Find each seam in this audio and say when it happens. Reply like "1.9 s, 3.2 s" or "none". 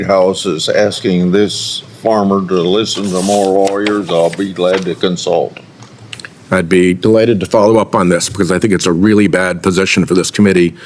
none